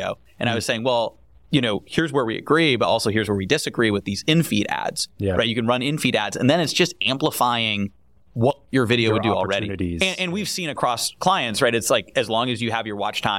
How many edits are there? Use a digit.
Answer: 0